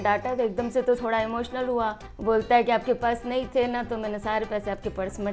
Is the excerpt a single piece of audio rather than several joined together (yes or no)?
no